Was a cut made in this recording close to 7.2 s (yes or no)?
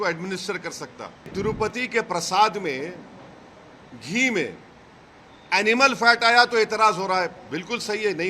no